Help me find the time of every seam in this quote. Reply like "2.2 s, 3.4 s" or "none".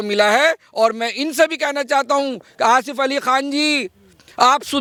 none